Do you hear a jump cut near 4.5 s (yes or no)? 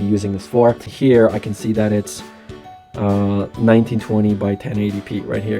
no